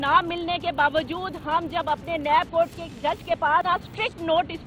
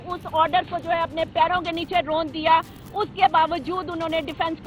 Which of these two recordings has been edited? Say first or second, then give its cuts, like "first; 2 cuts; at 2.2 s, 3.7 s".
first; 1 cut; at 3.6 s